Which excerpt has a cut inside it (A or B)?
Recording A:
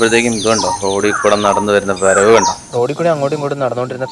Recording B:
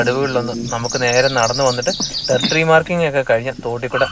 A